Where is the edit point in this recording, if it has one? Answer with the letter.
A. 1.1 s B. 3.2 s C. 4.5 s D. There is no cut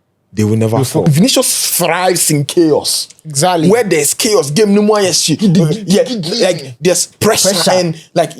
A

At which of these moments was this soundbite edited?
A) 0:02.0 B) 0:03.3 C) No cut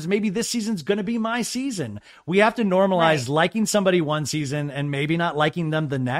C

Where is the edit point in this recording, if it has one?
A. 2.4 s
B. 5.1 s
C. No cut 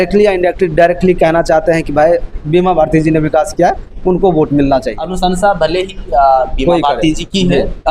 B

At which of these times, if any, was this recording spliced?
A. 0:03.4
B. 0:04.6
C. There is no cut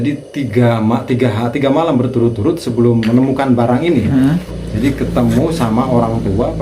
B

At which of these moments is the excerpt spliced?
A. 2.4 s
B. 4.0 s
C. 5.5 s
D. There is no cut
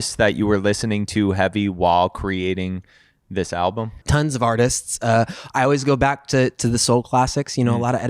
B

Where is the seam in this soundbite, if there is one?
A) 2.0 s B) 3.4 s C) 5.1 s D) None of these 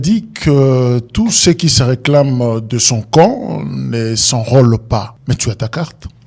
C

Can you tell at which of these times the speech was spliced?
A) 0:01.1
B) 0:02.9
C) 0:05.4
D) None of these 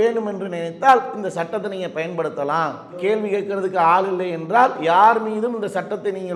D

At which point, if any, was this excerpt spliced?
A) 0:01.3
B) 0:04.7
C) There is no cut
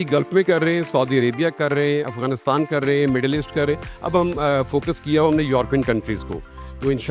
C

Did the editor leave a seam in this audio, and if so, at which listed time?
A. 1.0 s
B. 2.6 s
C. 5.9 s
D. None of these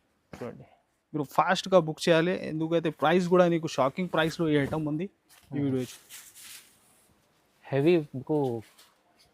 C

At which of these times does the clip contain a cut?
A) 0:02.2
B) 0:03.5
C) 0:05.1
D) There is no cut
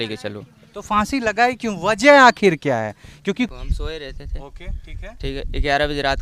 B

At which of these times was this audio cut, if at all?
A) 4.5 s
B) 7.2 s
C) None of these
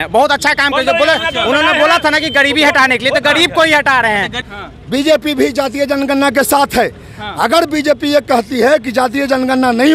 A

